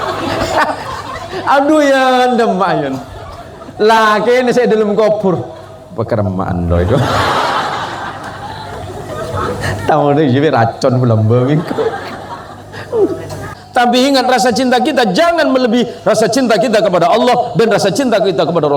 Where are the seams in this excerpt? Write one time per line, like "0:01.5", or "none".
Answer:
0:13.6